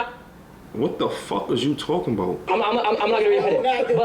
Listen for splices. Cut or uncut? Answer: cut